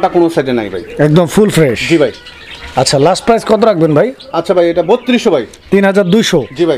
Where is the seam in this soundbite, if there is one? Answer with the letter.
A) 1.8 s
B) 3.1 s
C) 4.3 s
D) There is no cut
D